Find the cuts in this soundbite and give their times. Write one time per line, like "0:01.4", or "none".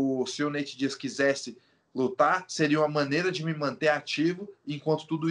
none